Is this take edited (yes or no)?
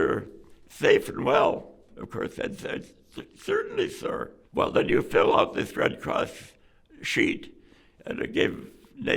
yes